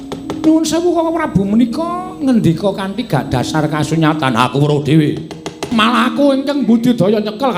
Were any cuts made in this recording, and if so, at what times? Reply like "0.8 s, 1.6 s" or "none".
5.6 s